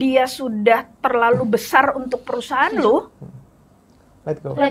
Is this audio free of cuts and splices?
yes; 0 cuts

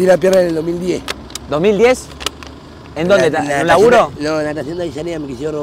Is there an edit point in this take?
no; 0 cuts

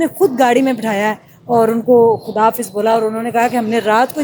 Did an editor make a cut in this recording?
no; 0 cuts

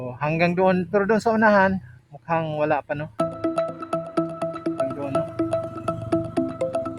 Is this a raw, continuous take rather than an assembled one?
no; 1 cut; at 3.1 s

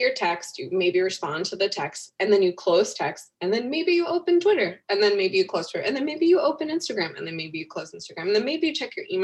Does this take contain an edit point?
no; 0 cuts

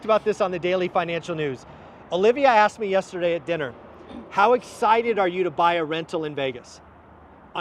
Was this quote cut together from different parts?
no; 0 cuts

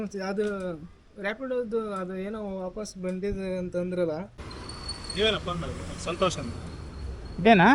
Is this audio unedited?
no; 1 cut; at 4.3 s

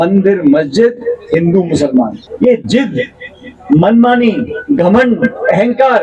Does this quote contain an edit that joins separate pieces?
yes; 1 cut; at 2.2 s

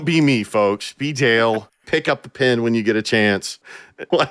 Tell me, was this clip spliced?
yes; 1 cut; at 1.8 s

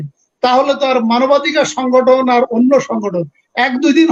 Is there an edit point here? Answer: no; 0 cuts

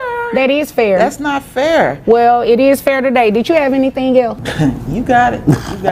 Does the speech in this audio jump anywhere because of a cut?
yes; 1 cut; at 4.4 s

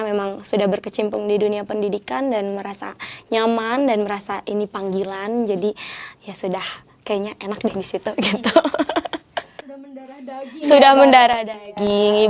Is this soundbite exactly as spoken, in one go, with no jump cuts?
yes; 0 cuts

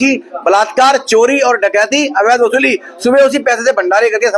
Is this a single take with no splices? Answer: yes; 0 cuts

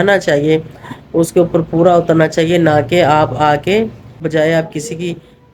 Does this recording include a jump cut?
yes; 1 cut; at 4.2 s

